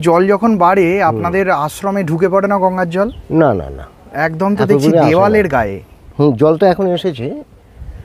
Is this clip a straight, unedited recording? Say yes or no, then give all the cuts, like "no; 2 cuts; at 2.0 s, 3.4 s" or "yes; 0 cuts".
yes; 0 cuts